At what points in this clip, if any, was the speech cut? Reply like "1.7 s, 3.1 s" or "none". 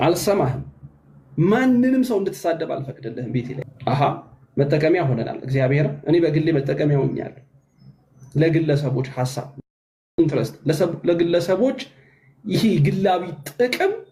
3.7 s

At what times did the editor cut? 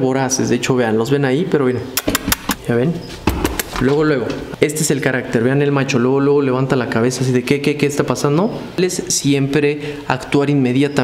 2.6 s, 4.4 s, 8.8 s

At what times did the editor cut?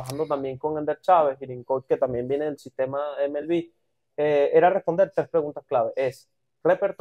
none

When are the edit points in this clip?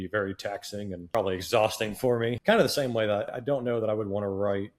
1.1 s, 2.4 s, 3.3 s

